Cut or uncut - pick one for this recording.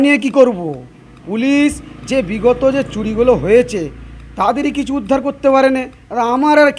uncut